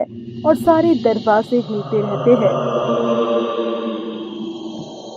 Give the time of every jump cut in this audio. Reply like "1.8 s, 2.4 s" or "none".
2.5 s